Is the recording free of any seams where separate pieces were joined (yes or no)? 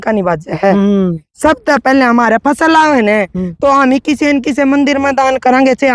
yes